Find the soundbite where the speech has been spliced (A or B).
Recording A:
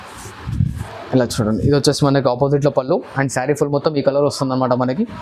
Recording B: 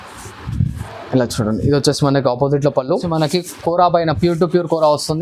B